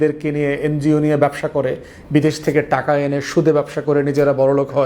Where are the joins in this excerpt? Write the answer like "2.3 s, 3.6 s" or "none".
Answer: none